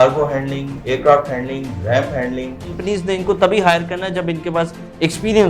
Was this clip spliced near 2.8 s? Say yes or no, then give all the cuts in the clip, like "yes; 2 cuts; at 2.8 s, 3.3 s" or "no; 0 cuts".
yes; 1 cut; at 2.8 s